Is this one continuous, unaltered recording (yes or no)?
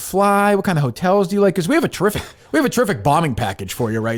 yes